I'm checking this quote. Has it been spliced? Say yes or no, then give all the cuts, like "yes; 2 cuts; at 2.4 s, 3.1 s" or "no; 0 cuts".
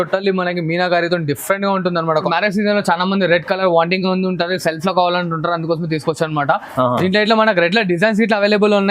yes; 1 cut; at 2.3 s